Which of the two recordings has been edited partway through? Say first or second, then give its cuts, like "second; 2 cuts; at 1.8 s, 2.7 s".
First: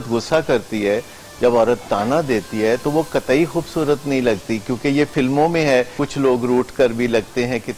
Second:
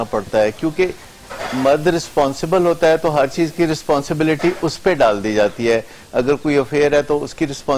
first; 1 cut; at 6.0 s